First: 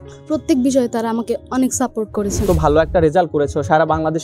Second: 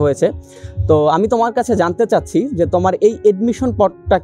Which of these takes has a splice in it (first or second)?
first